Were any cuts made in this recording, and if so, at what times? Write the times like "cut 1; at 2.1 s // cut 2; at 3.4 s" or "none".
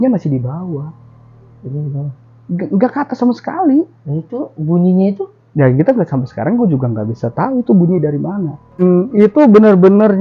cut 1; at 8.8 s